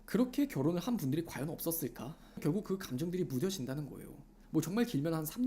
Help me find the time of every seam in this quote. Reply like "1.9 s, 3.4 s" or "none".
2.3 s, 4.3 s